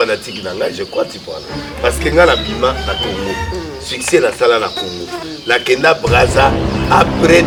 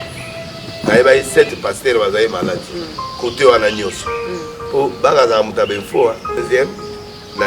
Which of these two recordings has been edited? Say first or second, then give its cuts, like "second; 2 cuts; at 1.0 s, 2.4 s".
second; 1 cut; at 6.4 s